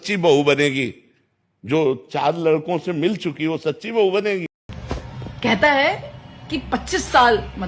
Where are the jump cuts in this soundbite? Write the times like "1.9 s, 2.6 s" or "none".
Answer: 4.5 s